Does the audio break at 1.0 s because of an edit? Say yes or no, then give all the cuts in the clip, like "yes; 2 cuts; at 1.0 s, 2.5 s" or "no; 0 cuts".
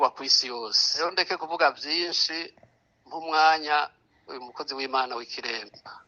yes; 1 cut; at 1.0 s